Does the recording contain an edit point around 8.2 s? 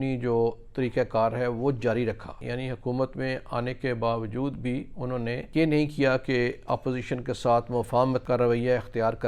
yes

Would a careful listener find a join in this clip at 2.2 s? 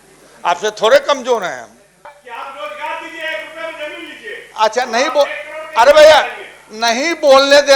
yes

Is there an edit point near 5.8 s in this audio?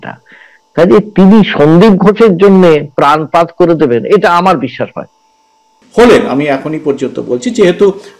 yes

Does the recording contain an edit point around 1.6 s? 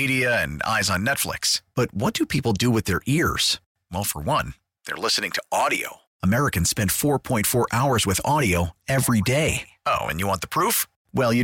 no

